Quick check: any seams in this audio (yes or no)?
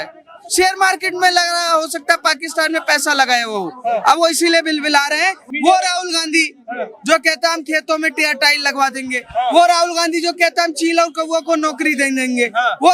yes